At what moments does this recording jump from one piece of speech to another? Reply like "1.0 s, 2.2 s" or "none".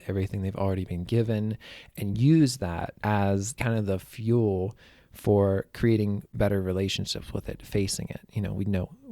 2.9 s, 3.5 s, 6.3 s